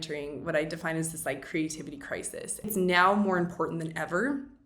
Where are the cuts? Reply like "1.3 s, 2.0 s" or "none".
2.7 s